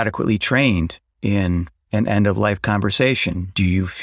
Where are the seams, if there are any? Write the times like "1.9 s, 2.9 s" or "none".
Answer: none